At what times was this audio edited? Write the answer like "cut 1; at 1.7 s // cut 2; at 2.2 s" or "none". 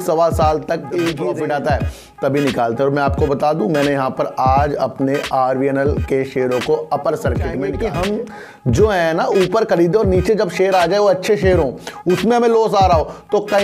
cut 1; at 1.3 s // cut 2; at 7.7 s